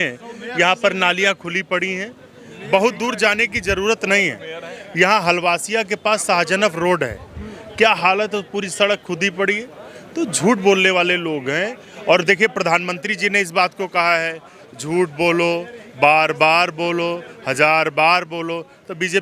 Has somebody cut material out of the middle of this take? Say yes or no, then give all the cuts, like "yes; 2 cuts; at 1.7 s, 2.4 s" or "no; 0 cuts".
no; 0 cuts